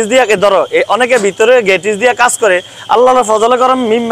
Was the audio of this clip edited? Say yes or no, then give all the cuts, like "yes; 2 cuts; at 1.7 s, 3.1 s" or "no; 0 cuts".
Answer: no; 0 cuts